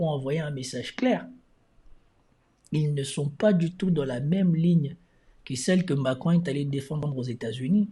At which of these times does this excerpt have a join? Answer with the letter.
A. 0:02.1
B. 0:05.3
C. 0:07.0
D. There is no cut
C